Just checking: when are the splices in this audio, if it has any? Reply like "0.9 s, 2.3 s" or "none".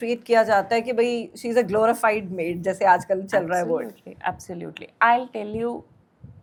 none

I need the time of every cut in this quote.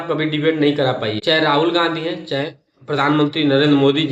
1.2 s

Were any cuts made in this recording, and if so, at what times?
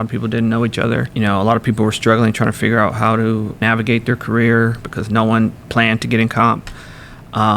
1.1 s, 3.6 s

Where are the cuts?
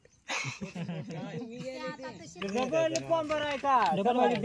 2.4 s

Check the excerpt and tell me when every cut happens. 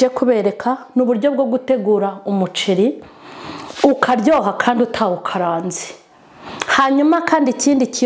none

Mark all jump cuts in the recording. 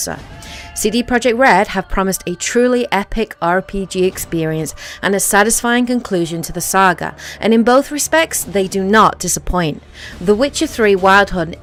none

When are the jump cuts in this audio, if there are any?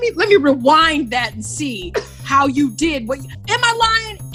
3.3 s

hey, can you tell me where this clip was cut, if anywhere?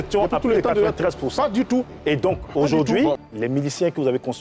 3.2 s

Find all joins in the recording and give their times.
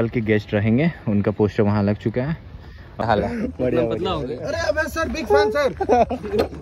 3.1 s

